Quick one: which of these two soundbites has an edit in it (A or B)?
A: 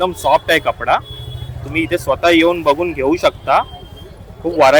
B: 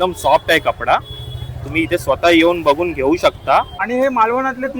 B